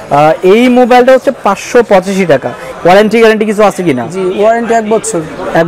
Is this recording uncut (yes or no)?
no